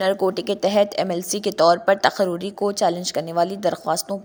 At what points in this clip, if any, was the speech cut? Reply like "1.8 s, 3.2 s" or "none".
none

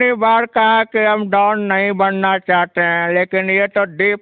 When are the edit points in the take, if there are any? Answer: none

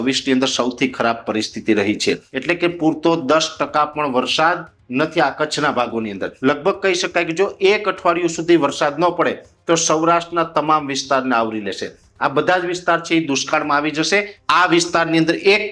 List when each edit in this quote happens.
2.3 s, 6.3 s, 14.3 s

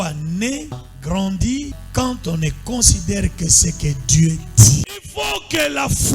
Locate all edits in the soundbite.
0.8 s, 1.8 s, 4.9 s

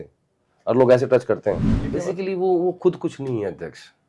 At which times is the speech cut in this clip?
1.7 s

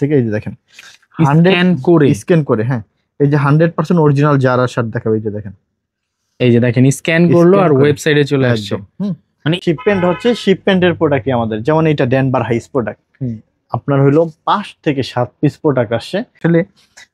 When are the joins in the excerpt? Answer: 9.6 s, 16.4 s

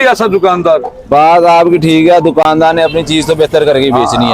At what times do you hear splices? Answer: none

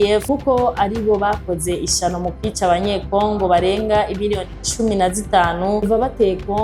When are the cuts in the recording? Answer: none

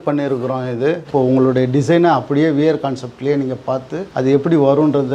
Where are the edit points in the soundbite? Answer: 1.0 s

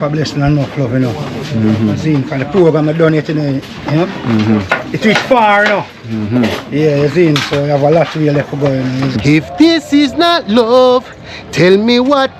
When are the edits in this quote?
9.2 s

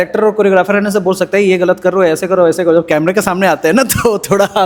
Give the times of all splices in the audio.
none

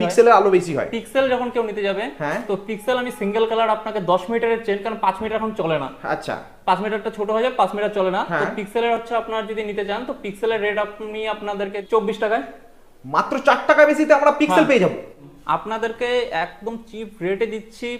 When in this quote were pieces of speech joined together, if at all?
11.8 s, 15.2 s

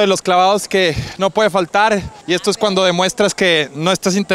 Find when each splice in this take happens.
2.1 s

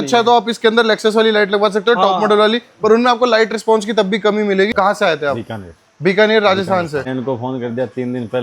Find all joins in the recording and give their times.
4.7 s, 7.1 s

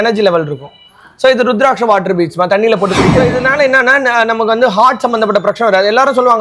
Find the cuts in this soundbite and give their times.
3.2 s

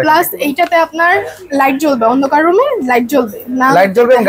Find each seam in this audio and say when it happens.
none

